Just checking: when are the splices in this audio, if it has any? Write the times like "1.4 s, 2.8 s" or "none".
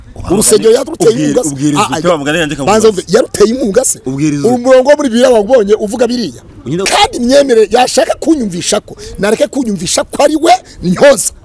6.7 s